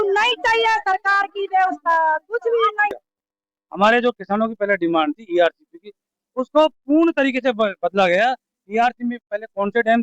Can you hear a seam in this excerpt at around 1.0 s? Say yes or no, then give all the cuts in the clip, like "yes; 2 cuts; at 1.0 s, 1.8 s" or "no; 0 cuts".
no; 1 cut; at 2.9 s